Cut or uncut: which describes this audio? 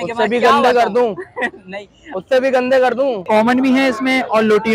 cut